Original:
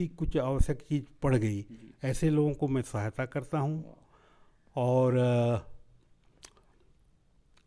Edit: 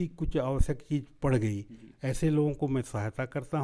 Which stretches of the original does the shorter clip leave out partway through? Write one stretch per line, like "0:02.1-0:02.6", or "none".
none

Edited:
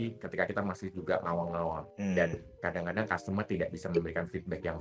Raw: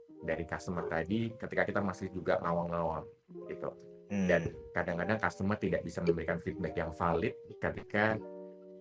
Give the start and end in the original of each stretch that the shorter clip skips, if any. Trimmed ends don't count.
0:03.1-0:04.0

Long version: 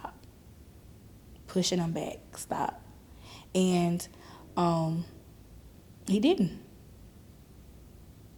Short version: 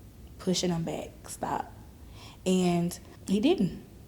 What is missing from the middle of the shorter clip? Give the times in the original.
0:04.2-0:05.9

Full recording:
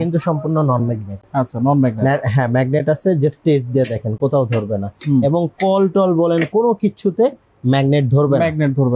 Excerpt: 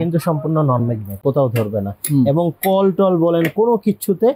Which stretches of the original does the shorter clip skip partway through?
0:01.1-0:04.1

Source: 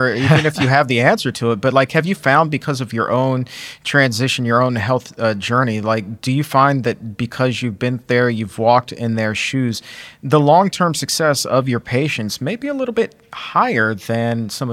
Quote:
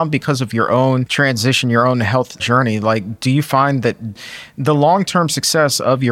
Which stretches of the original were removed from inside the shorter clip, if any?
0:03.5-0:03.8
0:05.1-0:05.4
0:07.2-0:09.8

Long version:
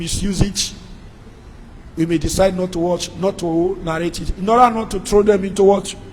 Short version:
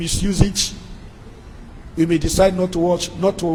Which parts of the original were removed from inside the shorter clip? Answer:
none

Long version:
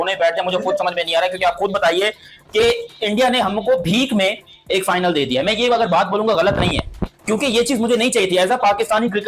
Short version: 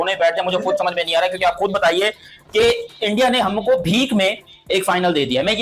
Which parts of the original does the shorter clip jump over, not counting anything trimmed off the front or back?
none

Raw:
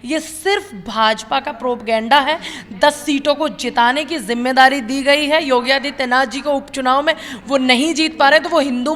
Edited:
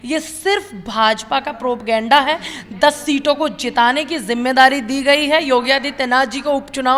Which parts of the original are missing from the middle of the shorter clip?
none

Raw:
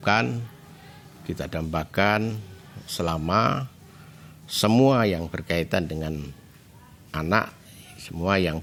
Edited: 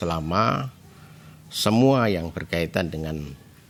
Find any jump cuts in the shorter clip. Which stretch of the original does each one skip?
none

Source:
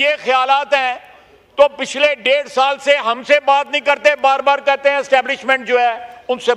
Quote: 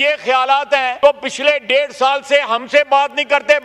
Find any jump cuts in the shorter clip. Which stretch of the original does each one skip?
0:00.9-0:01.5

